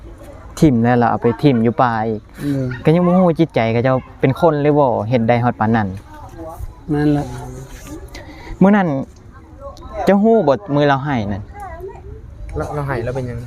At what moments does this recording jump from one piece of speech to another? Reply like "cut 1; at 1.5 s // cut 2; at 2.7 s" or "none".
cut 1; at 6.4 s